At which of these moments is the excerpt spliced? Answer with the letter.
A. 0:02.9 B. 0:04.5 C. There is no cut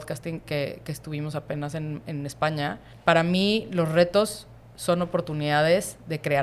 A